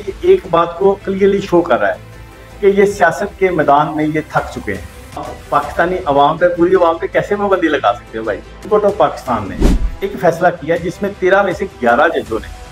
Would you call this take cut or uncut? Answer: cut